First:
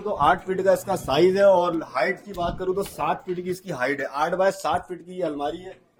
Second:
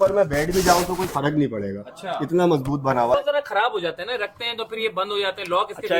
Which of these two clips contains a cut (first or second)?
second